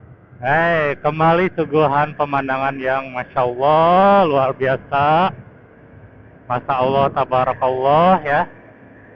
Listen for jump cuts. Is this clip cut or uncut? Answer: uncut